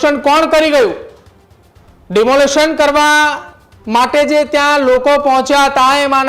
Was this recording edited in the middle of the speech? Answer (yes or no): no